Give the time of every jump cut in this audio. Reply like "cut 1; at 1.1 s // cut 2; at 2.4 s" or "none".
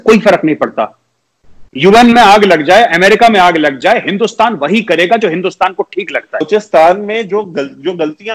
cut 1; at 6.5 s